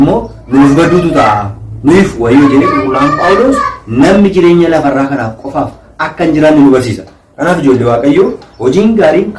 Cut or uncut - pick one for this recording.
uncut